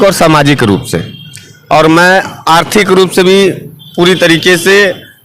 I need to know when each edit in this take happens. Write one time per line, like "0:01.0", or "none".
none